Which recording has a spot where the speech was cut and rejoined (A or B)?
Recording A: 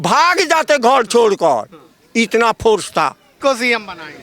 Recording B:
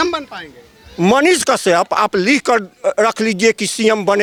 A